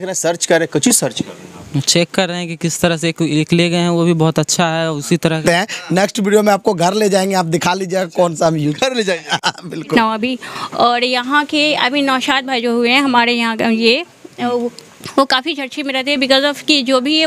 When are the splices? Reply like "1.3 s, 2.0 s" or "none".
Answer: 5.4 s, 10.0 s